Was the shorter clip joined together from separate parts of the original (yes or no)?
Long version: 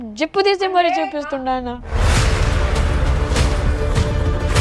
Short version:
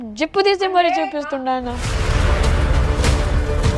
yes